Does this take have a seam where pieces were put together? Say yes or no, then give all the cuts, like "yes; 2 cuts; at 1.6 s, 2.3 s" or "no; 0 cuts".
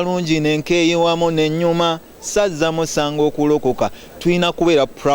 no; 0 cuts